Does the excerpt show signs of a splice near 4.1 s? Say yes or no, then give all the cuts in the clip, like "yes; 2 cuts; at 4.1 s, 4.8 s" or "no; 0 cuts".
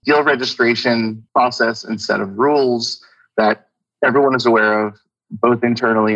no; 1 cut; at 1.2 s